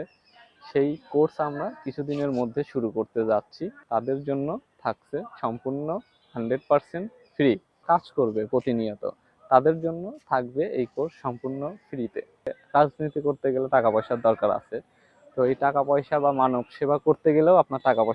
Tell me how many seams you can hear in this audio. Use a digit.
3